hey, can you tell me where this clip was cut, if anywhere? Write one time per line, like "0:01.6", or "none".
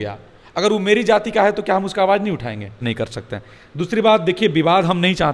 0:02.8